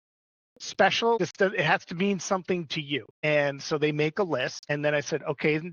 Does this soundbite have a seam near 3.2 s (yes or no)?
yes